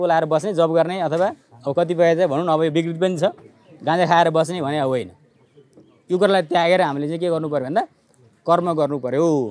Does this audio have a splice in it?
no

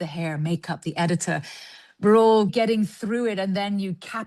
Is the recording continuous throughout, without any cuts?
no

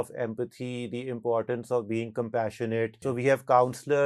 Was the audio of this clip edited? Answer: yes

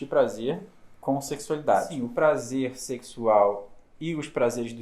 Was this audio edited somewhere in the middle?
yes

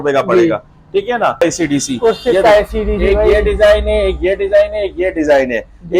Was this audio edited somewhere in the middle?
yes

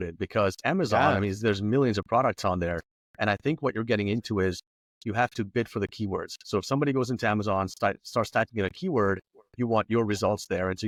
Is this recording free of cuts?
yes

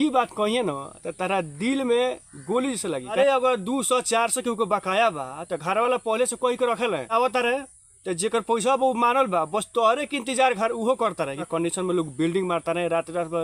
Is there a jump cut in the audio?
yes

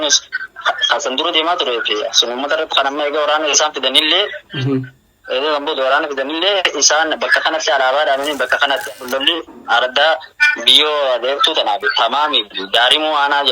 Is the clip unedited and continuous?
no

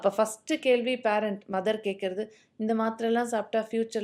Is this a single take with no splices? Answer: yes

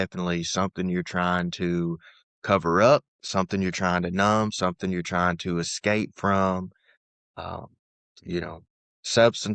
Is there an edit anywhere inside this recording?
no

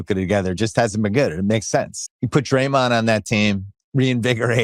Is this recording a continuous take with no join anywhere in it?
no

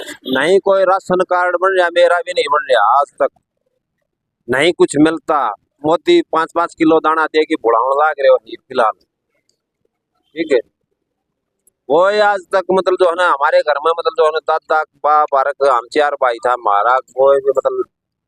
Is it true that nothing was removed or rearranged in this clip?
yes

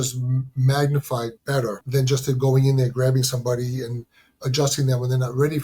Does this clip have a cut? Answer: yes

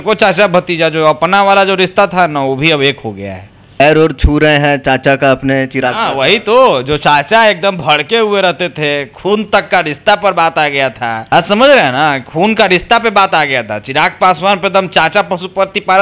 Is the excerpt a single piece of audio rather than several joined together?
no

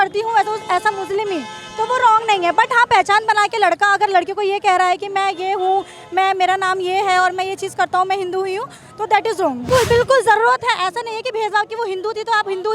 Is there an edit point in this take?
yes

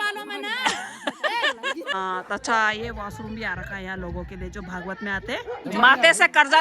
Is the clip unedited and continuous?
no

